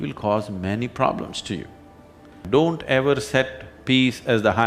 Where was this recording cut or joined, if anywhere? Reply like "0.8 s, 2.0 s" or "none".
2.4 s